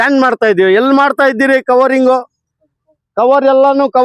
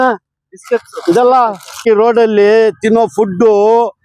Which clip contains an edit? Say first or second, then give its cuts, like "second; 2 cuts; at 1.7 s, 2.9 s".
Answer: second; 1 cut; at 1.8 s